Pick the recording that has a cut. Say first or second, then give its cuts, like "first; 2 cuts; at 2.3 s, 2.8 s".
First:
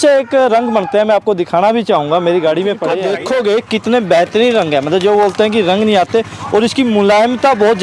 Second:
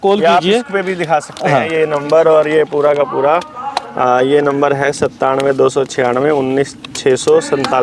first; 1 cut; at 3.0 s